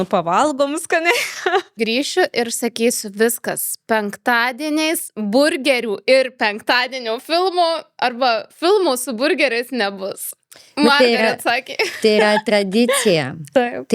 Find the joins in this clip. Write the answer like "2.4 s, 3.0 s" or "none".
1.8 s